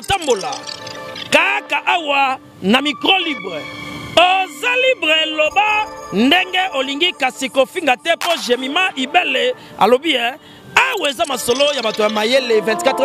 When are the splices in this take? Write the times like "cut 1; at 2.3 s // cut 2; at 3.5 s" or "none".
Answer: none